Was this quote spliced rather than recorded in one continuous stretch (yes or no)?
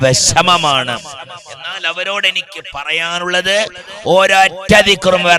no